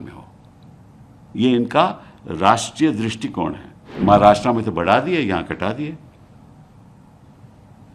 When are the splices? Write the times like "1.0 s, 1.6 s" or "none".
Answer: 3.9 s